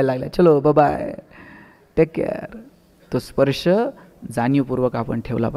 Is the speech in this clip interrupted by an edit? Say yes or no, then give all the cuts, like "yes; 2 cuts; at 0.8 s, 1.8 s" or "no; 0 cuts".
no; 0 cuts